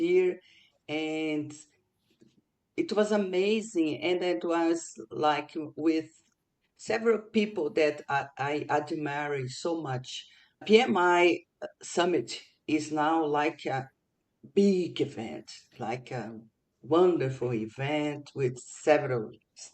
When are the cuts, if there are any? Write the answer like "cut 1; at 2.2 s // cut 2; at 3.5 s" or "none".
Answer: cut 1; at 10.6 s // cut 2; at 11.7 s